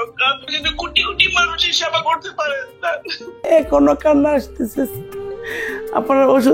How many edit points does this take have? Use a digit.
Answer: 1